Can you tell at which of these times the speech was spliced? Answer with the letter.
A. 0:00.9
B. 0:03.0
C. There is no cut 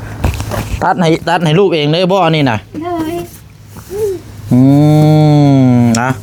C